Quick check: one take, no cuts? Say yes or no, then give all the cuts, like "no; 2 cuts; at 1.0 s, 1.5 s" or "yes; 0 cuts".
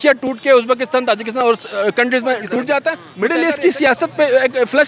no; 1 cut; at 3.1 s